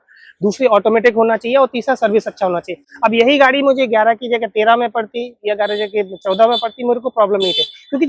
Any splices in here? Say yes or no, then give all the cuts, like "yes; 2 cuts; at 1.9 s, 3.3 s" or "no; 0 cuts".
no; 0 cuts